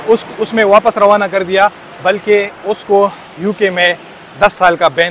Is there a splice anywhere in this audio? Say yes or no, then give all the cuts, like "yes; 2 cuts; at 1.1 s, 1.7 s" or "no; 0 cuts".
no; 0 cuts